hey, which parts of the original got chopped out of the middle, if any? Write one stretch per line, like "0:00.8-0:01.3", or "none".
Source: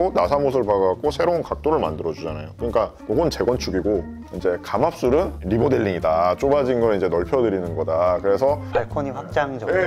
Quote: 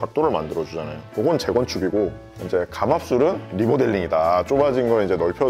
0:02.5-0:03.0